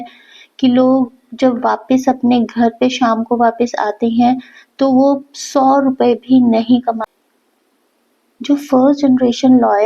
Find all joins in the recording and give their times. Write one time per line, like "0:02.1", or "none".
0:07.1